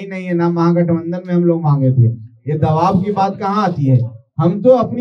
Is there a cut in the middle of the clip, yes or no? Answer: no